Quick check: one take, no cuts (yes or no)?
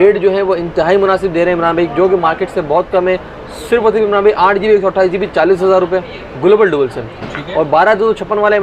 yes